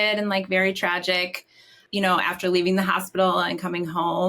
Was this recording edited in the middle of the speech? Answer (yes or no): yes